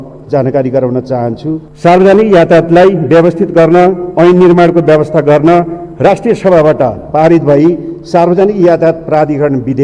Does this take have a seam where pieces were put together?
yes; 1 cut; at 1.7 s

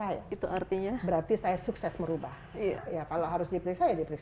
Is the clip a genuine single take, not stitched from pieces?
no; 1 cut; at 2.8 s

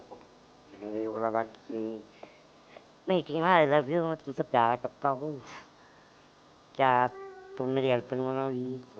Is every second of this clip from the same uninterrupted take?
yes; 0 cuts

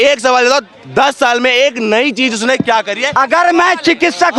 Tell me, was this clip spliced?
yes; 1 cut; at 3.1 s

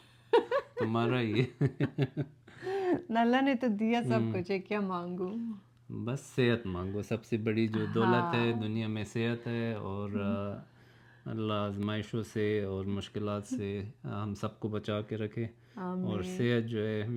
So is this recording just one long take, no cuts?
yes; 0 cuts

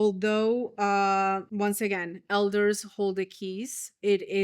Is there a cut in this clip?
yes; 1 cut; at 1.5 s

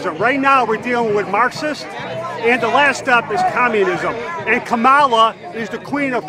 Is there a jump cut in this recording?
no; 0 cuts

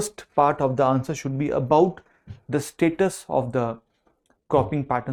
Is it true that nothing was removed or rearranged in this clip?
yes; 0 cuts

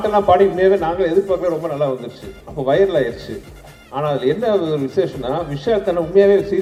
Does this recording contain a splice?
no; 0 cuts

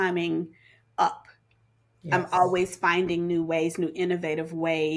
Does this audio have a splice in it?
no; 0 cuts

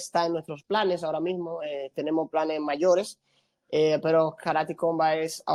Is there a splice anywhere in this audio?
no; 0 cuts

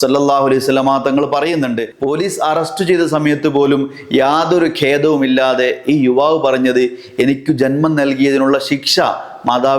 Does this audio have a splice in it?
yes; 1 cut; at 1.9 s

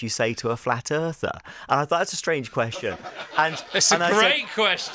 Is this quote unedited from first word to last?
yes; 0 cuts

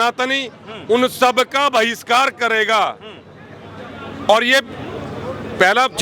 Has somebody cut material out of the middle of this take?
no; 0 cuts

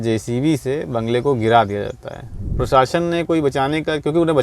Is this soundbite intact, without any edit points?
no; 1 cut; at 2.5 s

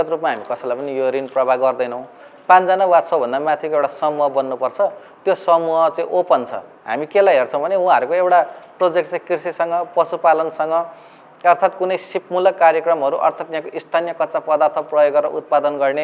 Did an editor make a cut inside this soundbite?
no; 0 cuts

